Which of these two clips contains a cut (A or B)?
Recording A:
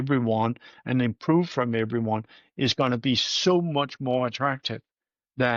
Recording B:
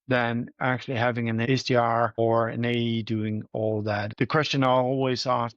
B